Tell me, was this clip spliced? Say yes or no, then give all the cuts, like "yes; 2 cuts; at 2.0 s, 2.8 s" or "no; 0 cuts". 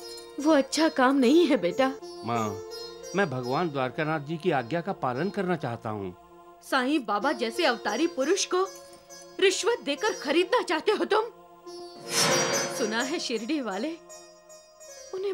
yes; 1 cut; at 2.1 s